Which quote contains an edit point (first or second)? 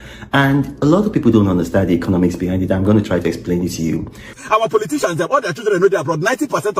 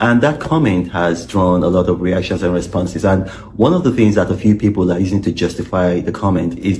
first